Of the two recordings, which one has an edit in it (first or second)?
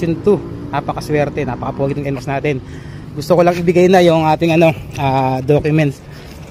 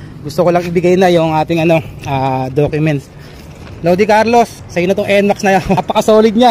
second